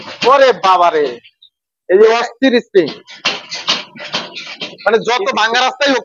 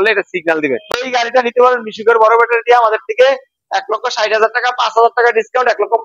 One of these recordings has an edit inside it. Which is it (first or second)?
second